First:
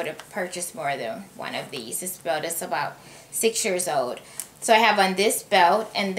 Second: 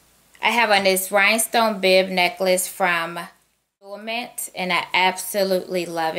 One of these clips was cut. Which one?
second; 1 cut; at 4.0 s

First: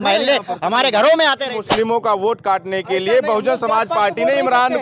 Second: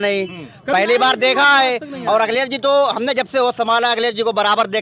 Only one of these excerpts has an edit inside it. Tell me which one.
first; 1 cut; at 1.5 s

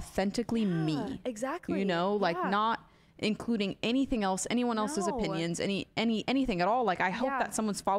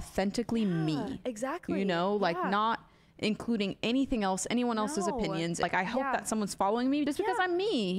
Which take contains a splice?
second; 2 cuts; at 5.6 s, 7.1 s

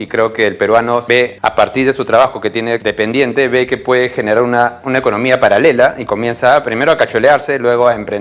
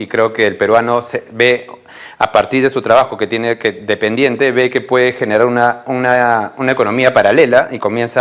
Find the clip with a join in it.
first; 3 cuts; at 1.2 s, 2.8 s, 4.8 s

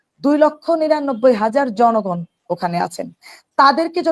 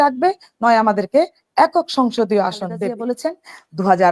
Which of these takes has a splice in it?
second; 1 cut; at 2.9 s

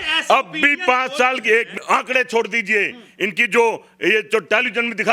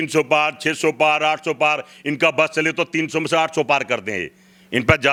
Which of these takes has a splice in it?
first; 1 cut; at 1.8 s

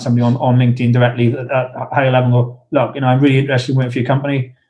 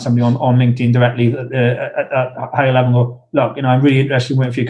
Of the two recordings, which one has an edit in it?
first; 1 cut; at 1.5 s

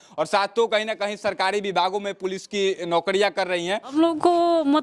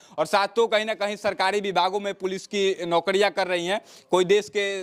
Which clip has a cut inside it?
first; 1 cut; at 3.9 s

